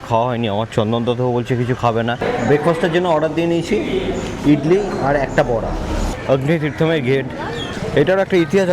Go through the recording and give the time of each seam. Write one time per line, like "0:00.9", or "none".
0:02.2
0:06.0
0:07.8

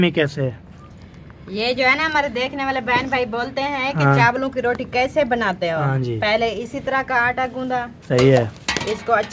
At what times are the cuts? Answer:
none

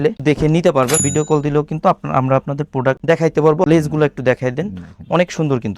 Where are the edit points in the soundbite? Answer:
0:01.0
0:03.6

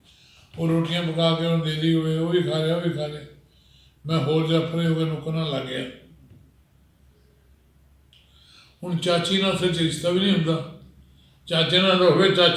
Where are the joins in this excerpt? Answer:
none

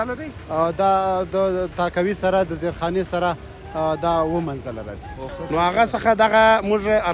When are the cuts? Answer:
0:05.3

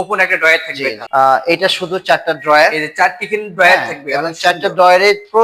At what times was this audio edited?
0:01.0

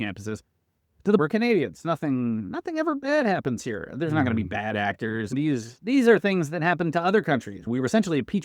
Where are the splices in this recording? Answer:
0:01.2
0:05.3
0:07.6

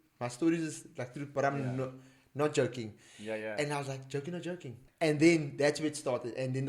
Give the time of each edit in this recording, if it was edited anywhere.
0:04.8

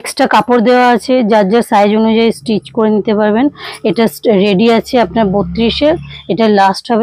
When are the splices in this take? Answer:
none

